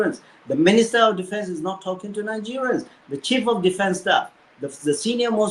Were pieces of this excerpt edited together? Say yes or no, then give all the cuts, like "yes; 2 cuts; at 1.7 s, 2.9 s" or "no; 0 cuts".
no; 0 cuts